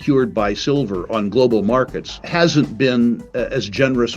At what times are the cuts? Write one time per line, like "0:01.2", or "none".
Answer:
0:02.2